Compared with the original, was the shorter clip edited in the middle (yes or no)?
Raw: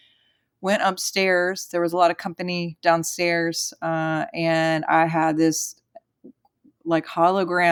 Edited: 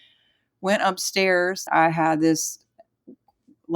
yes